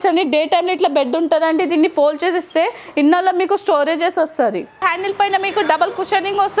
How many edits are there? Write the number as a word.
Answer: one